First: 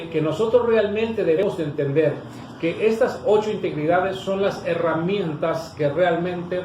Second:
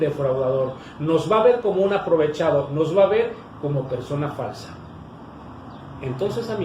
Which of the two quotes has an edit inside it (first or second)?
first